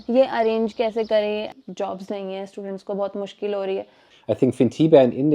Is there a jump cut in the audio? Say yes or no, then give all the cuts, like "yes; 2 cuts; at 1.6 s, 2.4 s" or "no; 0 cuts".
yes; 2 cuts; at 1.5 s, 4.1 s